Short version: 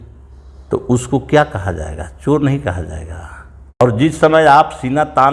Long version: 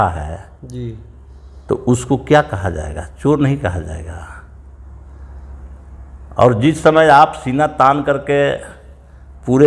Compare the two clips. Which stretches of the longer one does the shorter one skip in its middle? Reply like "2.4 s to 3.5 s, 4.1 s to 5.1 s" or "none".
4.8 s to 6.4 s